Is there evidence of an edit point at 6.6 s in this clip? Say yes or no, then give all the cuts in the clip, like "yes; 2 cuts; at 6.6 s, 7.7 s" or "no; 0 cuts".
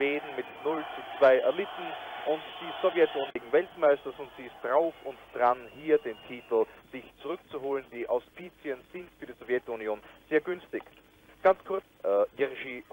no; 2 cuts; at 3.3 s, 11.9 s